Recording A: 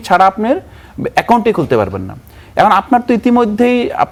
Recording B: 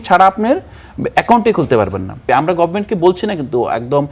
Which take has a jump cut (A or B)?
B